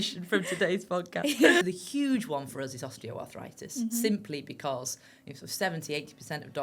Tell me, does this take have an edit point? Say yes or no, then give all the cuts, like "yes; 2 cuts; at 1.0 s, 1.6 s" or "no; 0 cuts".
yes; 1 cut; at 1.6 s